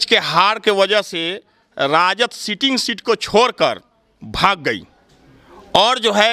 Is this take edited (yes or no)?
no